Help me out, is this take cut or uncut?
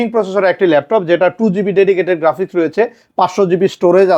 uncut